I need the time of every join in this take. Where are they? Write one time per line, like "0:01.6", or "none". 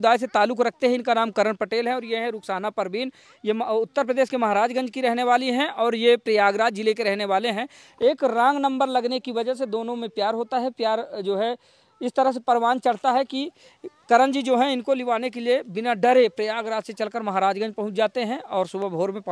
none